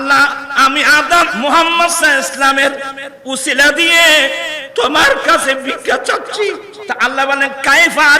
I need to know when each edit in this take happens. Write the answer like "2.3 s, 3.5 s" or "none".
1.3 s, 6.7 s